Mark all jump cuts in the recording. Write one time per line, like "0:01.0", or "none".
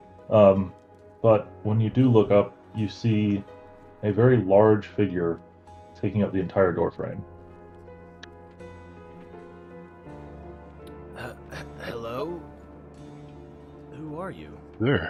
none